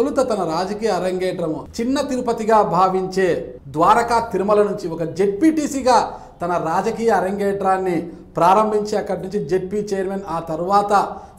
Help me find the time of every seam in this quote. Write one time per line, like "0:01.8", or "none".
0:01.7
0:03.6